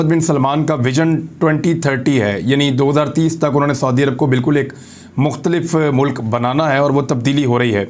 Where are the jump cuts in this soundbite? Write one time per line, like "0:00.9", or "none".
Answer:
none